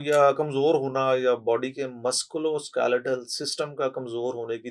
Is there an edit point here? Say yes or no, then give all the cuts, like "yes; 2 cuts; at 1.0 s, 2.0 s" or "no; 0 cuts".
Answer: no; 0 cuts